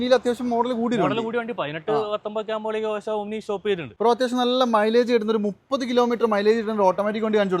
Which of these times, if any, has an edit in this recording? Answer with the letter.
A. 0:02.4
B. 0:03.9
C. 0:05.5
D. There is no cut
B